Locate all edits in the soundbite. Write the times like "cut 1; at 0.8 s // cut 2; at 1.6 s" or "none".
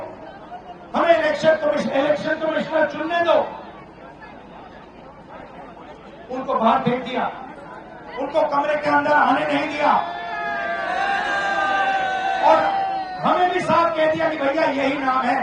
none